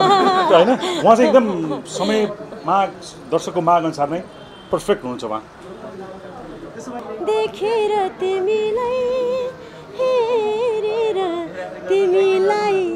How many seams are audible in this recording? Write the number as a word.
one